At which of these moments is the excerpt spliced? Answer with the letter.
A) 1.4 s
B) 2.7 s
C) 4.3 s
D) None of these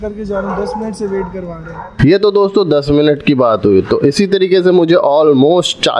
D